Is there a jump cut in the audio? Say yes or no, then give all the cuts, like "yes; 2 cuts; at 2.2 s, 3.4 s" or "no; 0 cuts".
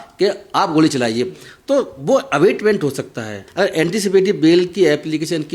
yes; 1 cut; at 3.4 s